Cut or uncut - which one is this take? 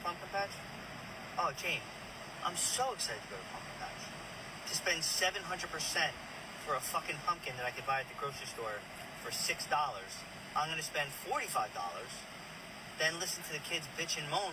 uncut